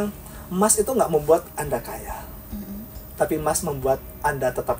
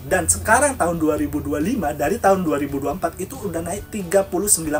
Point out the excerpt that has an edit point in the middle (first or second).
second